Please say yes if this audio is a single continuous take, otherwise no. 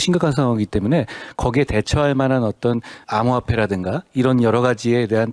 no